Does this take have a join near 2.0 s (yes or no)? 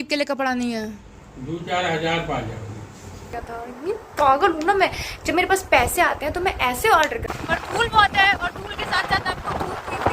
no